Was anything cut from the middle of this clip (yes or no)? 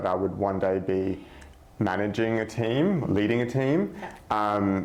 no